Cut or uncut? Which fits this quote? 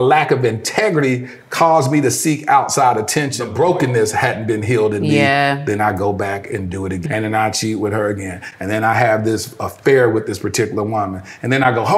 cut